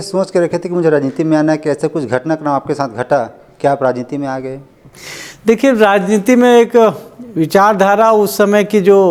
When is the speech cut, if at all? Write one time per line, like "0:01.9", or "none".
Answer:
none